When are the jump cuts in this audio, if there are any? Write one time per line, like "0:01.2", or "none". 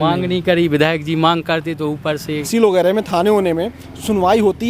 0:02.5

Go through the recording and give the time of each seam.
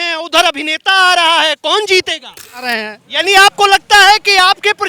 0:02.6

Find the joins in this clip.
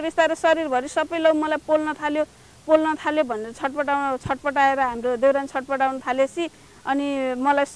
none

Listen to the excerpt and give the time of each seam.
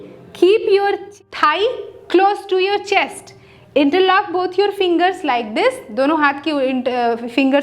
0:01.1

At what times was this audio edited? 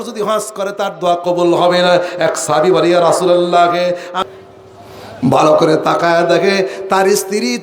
0:04.2

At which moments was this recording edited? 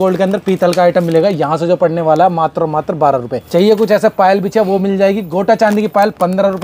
0:03.4

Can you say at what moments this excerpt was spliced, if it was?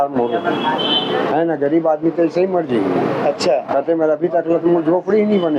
none

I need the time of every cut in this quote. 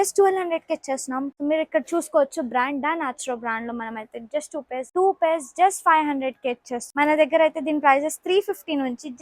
0:01.3
0:04.9
0:06.9

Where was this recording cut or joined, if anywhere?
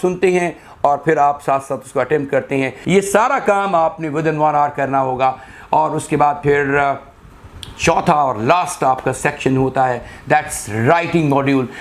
0:02.8

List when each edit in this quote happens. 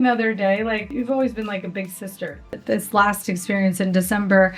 0:00.9
0:02.6

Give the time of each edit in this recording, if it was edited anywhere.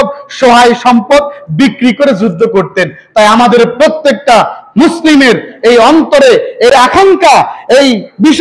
0:06.7

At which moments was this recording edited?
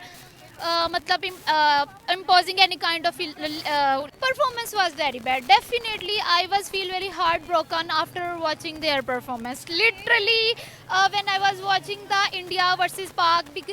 0:04.1

